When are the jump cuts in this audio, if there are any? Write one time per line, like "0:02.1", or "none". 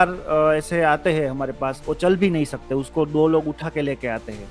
0:01.8

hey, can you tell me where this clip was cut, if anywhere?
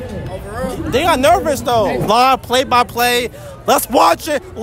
0:02.0

